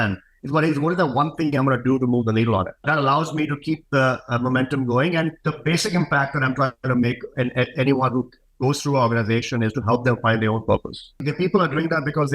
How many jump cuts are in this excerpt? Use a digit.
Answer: 3